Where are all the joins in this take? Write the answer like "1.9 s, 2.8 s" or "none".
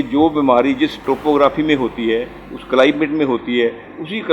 1.0 s